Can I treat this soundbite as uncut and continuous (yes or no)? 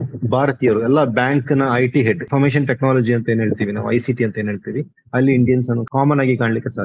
no